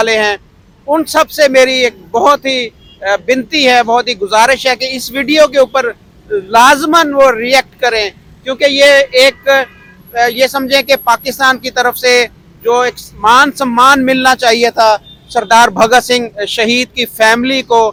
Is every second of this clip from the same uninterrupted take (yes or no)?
yes